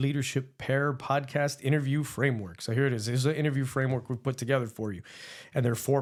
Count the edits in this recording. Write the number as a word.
zero